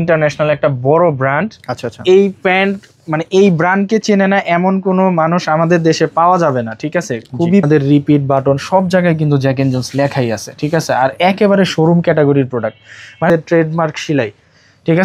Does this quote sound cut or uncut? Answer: cut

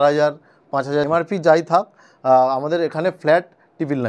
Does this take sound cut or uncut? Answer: cut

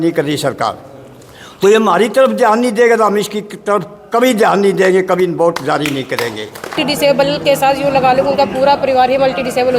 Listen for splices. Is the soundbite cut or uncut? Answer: cut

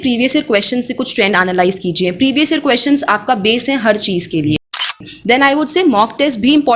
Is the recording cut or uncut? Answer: cut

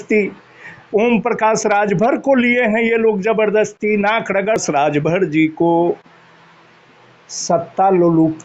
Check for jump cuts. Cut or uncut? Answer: cut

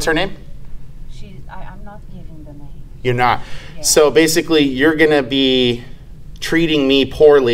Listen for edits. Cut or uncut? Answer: uncut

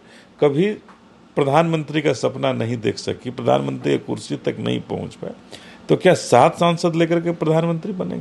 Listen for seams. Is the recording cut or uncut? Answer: uncut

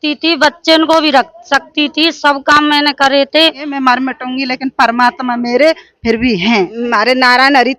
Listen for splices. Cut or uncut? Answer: cut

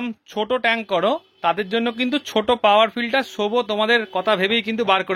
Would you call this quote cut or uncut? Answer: uncut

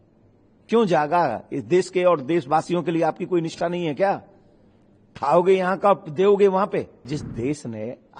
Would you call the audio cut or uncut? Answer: cut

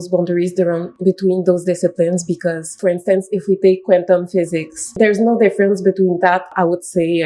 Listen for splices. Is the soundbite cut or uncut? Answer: cut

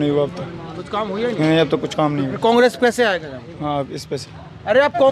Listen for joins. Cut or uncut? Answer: uncut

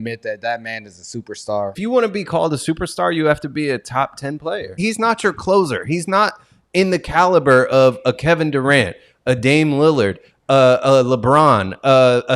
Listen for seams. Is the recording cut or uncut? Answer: cut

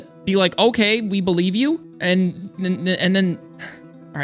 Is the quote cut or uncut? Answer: uncut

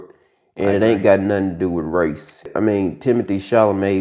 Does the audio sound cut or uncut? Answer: cut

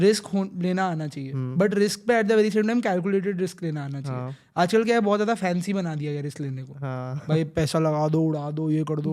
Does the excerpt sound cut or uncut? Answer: uncut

